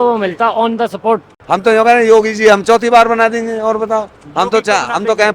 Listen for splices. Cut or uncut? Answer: cut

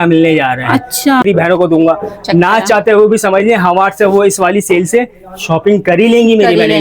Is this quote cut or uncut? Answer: cut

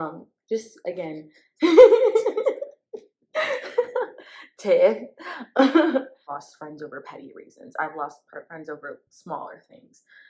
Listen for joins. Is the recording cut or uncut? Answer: cut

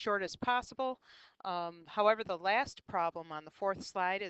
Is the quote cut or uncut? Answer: cut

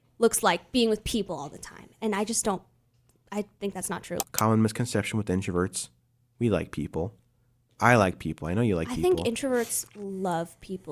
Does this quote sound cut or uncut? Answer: cut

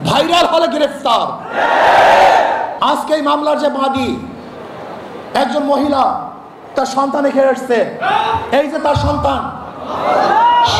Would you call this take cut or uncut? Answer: cut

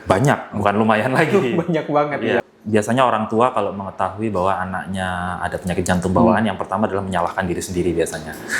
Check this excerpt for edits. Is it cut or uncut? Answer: cut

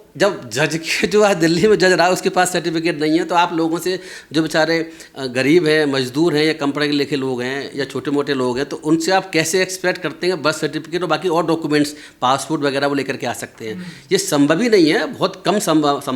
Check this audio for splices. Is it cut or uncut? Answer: uncut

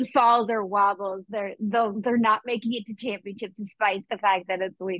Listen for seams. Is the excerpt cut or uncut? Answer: uncut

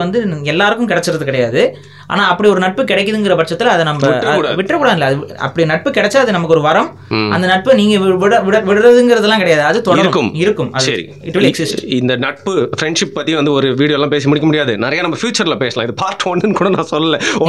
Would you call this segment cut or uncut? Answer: uncut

